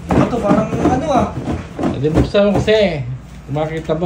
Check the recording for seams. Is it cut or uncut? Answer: uncut